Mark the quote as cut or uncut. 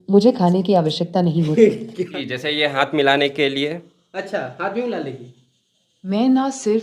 cut